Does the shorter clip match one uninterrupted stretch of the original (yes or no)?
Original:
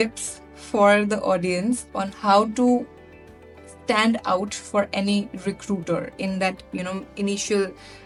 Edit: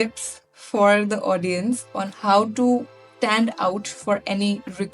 no